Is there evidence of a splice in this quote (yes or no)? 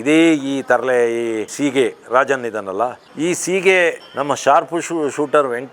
yes